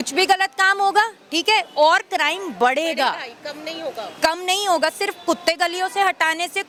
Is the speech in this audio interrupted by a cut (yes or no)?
no